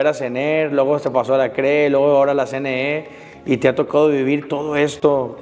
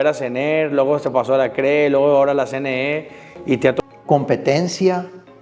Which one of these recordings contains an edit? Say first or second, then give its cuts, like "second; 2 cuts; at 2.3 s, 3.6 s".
second; 1 cut; at 3.8 s